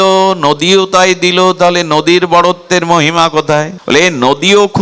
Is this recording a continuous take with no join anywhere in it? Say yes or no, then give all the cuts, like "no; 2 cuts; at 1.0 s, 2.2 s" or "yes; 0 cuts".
no; 1 cut; at 3.8 s